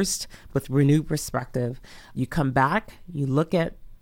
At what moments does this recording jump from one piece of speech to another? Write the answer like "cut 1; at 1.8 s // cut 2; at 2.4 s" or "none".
cut 1; at 2.1 s